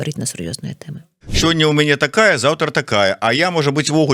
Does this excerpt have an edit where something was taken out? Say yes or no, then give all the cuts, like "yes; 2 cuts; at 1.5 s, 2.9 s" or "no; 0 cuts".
yes; 1 cut; at 1.3 s